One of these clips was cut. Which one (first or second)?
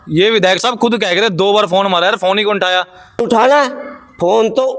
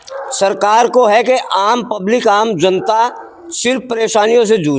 first